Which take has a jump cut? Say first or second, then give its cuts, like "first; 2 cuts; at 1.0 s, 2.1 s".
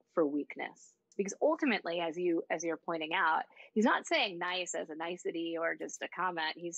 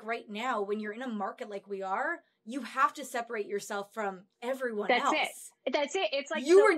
first; 1 cut; at 1.0 s